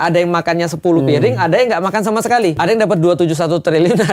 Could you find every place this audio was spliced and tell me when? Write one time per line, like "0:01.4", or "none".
0:02.6